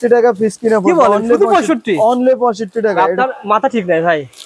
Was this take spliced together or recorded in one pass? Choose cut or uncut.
uncut